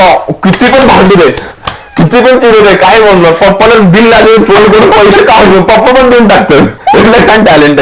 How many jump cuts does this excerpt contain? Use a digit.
1